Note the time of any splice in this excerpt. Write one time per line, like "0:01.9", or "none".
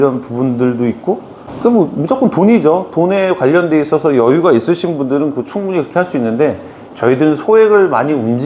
none